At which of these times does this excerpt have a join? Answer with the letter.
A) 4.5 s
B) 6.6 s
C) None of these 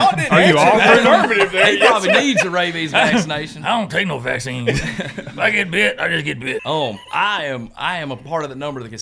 B